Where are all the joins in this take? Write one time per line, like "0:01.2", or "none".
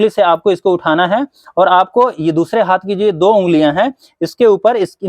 none